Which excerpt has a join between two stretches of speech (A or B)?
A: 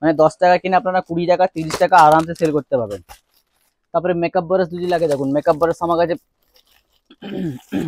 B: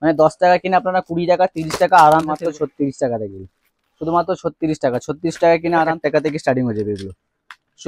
B